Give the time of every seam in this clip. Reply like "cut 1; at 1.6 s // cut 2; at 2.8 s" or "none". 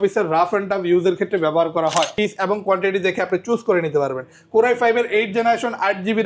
cut 1; at 2.1 s

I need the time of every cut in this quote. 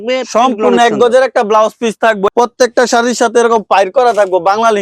cut 1; at 2.3 s

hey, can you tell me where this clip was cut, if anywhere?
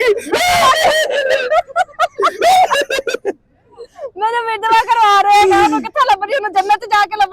none

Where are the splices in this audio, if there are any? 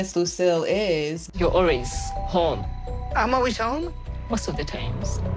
cut 1; at 1.2 s

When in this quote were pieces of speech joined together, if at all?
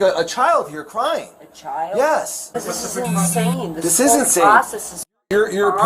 cut 1; at 2.5 s

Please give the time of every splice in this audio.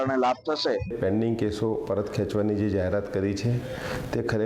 cut 1; at 0.9 s

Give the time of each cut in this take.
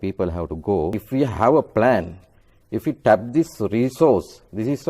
cut 1; at 1.0 s

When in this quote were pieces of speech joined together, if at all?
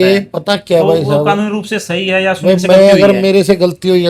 none

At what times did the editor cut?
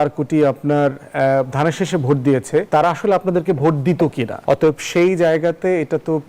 cut 1; at 2.7 s // cut 2; at 4.3 s

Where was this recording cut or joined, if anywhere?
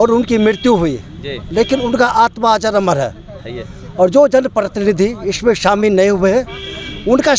none

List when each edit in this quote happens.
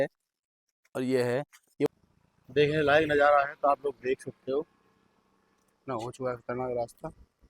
cut 1; at 1.9 s

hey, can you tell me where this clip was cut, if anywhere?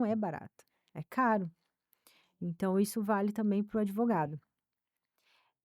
none

